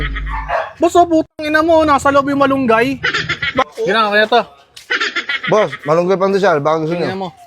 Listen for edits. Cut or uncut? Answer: cut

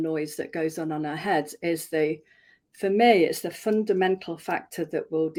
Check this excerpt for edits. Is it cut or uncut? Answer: uncut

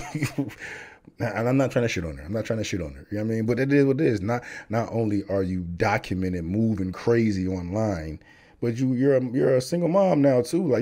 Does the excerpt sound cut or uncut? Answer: uncut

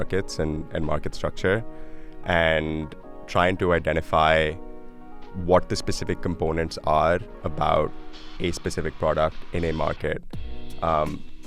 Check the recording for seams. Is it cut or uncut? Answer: uncut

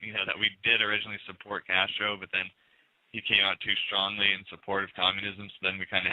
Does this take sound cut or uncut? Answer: cut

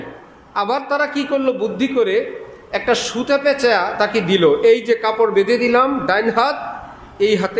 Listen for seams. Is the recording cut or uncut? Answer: uncut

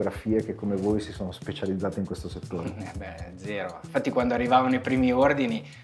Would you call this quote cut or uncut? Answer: cut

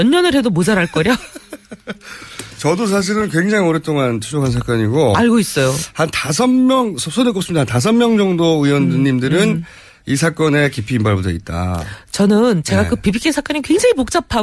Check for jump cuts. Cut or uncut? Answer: uncut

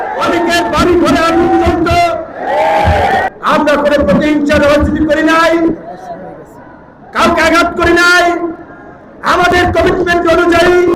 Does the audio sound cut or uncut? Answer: cut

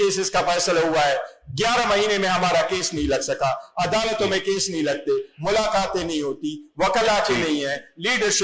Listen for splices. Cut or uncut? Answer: uncut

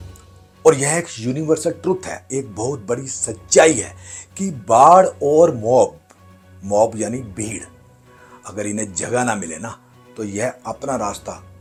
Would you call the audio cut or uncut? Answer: uncut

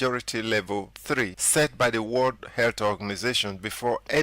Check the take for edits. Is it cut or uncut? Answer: cut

